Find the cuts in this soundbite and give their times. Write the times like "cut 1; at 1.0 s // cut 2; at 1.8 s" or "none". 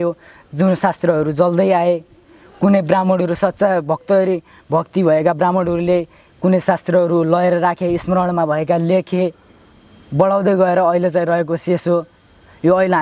none